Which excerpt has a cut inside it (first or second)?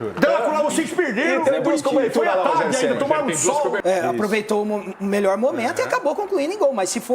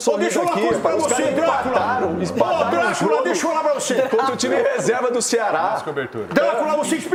first